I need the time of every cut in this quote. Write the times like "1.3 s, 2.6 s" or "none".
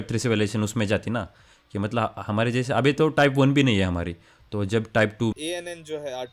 5.3 s